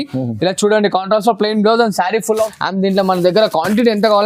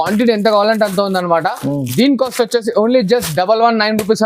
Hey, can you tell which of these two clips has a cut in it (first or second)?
first